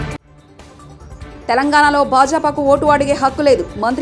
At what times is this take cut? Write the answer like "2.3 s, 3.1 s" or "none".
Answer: 1.3 s